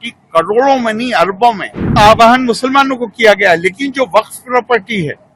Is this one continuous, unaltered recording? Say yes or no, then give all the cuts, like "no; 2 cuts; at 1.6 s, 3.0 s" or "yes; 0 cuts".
no; 1 cut; at 2.0 s